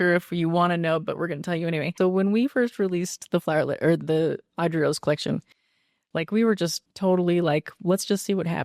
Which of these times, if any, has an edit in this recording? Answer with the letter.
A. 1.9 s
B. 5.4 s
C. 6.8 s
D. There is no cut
A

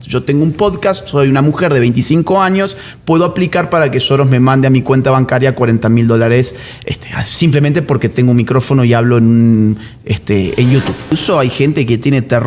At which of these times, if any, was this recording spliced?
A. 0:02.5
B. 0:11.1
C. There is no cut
B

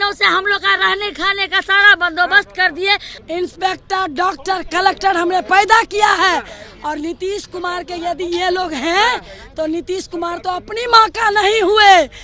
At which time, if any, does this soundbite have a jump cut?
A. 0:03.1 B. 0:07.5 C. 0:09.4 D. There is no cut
A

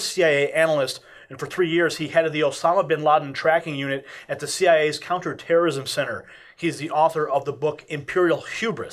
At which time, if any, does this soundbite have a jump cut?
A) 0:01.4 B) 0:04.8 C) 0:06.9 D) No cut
C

